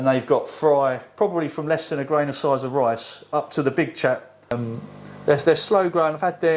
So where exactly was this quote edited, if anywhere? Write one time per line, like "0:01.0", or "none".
0:04.5